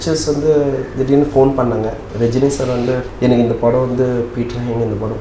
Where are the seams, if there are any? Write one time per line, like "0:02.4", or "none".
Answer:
0:02.0
0:03.1